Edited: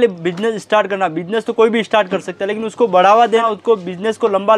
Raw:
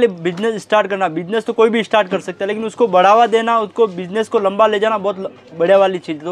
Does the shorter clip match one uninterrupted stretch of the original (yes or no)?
no